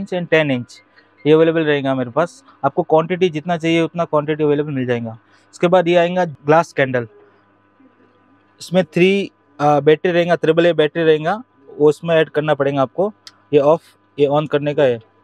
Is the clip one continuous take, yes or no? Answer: yes